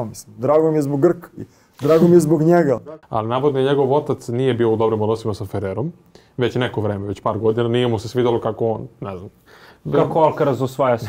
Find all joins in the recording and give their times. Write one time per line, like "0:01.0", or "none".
0:02.8